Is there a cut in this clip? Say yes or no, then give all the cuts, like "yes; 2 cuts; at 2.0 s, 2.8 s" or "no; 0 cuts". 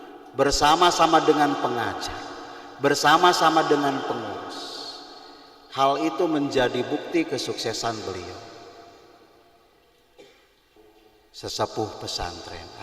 yes; 1 cut; at 10.7 s